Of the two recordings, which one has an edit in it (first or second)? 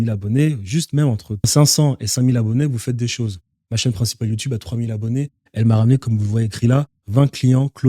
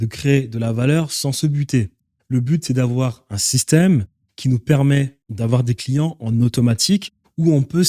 first